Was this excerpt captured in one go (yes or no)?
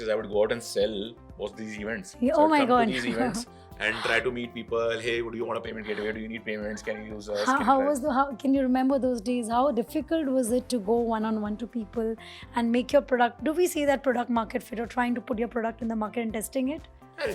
yes